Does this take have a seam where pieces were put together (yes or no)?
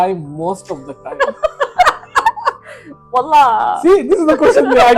no